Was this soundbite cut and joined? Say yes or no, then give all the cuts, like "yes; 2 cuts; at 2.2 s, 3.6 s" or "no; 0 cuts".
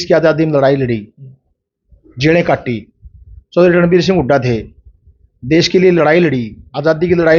no; 0 cuts